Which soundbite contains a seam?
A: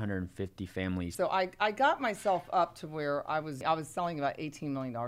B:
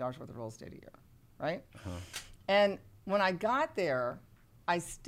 A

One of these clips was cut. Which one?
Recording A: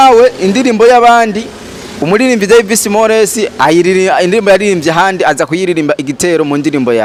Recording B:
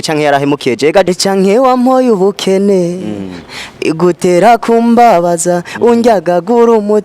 B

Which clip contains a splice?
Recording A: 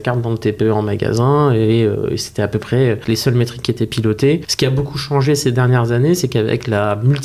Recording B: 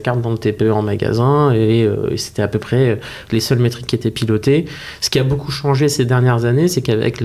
A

